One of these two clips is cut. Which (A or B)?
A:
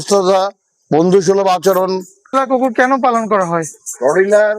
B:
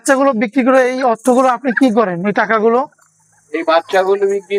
A